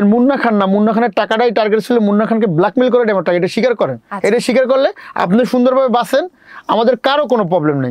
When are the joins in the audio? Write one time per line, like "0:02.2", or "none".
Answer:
none